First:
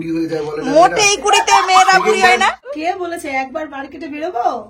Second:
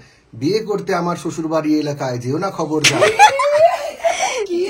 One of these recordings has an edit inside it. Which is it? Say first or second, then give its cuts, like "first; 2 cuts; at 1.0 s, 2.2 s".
first; 1 cut; at 2.7 s